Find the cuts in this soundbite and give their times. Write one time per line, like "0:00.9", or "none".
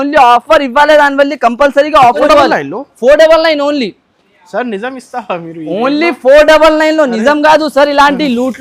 0:02.2